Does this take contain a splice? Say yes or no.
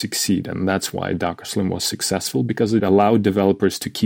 yes